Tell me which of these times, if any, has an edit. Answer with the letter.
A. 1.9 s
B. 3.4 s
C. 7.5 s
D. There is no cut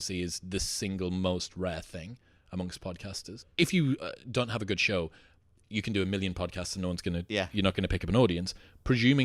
B